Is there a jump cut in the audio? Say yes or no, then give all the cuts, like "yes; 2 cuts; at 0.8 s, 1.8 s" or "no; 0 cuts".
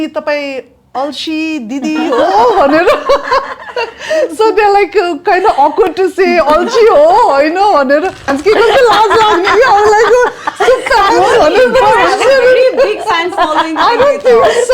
yes; 1 cut; at 8.3 s